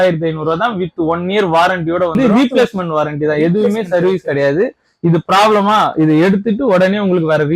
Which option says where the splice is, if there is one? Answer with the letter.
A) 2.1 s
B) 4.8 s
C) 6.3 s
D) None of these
A